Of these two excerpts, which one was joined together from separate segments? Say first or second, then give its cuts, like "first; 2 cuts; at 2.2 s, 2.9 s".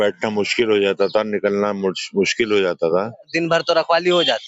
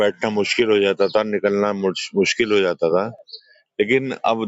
first; 1 cut; at 3.3 s